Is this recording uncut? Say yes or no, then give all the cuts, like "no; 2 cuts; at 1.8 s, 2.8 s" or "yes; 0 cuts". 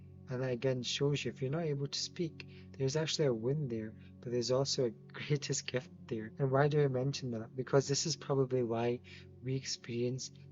no; 1 cut; at 6.3 s